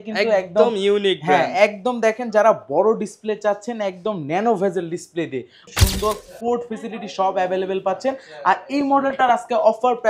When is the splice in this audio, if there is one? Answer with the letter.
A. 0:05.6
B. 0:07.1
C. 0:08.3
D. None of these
A